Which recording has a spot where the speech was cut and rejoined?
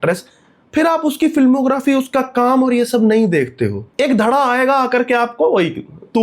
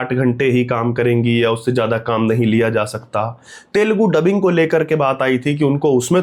first; 1 cut; at 3.9 s

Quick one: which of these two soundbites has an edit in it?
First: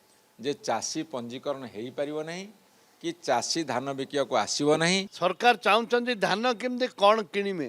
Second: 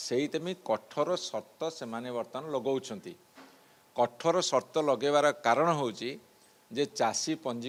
first; 1 cut; at 5.2 s

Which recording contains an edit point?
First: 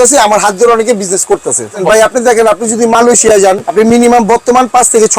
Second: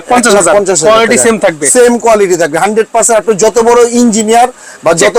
first; 2 cuts; at 1.8 s, 3.6 s

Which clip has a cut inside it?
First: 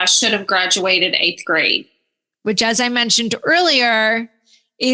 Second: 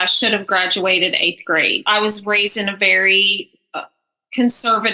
second; 1 cut; at 1.8 s

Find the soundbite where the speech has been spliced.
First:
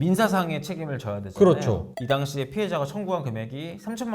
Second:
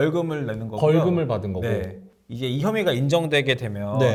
first; 1 cut; at 1.9 s

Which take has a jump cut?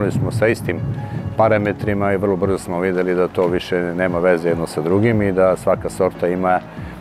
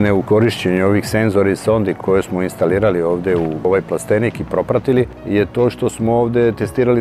second; 3 cuts; at 2.0 s, 3.7 s, 5.2 s

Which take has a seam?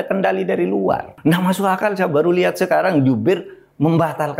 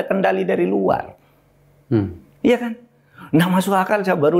first; 1 cut; at 1.1 s

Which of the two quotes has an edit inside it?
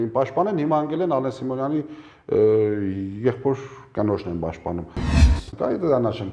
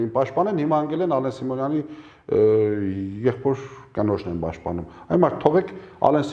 first; 1 cut; at 5.0 s

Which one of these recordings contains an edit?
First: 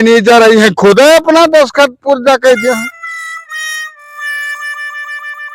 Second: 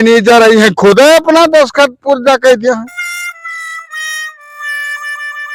first; 1 cut; at 2.9 s

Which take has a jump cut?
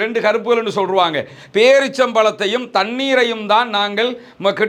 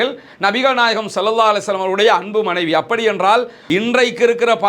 second; 1 cut; at 3.5 s

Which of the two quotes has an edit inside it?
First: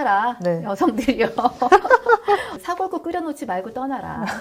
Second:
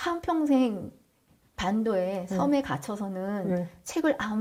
first; 1 cut; at 2.5 s

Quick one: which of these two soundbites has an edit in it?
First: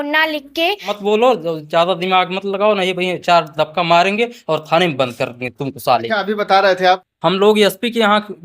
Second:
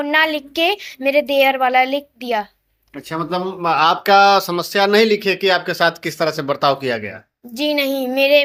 first; 2 cuts; at 0.9 s, 7.0 s

